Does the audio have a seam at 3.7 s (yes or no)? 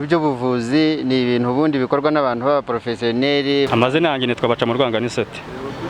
yes